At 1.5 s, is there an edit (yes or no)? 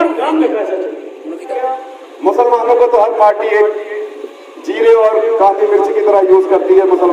yes